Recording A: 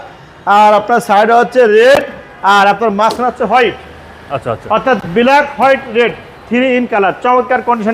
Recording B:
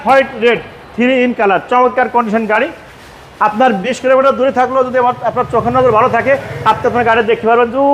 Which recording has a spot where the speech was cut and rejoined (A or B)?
B